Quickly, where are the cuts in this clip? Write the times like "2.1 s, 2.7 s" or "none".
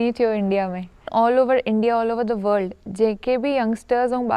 1.1 s